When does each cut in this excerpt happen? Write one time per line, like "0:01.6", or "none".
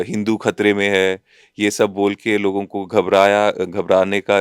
none